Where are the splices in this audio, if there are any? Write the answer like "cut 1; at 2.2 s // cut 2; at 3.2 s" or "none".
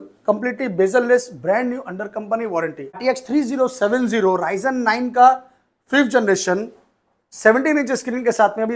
cut 1; at 3.0 s